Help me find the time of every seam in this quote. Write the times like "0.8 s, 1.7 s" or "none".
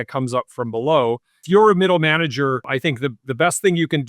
1.4 s, 2.7 s